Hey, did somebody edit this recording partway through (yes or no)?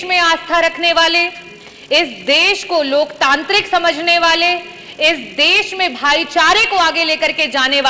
no